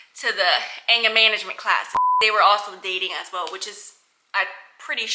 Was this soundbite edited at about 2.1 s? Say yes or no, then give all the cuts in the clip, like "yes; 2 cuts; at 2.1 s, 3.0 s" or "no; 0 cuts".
yes; 1 cut; at 2.1 s